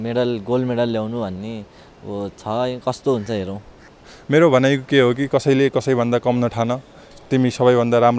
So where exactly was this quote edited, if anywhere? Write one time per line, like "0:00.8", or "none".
0:03.7